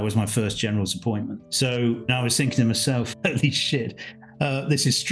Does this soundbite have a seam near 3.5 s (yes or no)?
no